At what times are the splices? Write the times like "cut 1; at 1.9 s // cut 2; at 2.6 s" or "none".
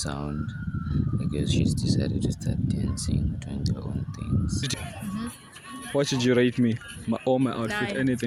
cut 1; at 4.8 s